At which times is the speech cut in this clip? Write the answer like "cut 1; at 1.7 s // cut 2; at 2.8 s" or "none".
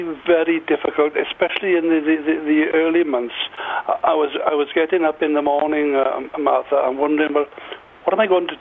none